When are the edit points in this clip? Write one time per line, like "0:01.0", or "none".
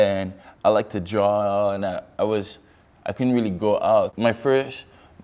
0:04.1